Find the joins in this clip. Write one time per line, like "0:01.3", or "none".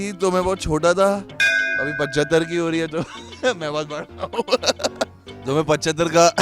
0:05.3